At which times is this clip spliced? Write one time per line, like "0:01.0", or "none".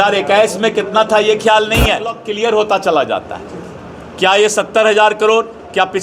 0:02.2